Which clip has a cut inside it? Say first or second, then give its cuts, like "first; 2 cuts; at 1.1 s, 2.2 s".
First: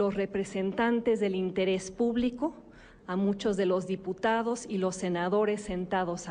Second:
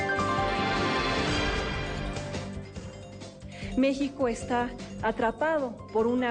first; 1 cut; at 5.2 s